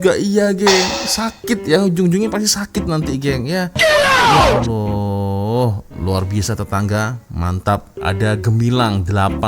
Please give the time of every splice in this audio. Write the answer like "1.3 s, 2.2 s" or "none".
7.9 s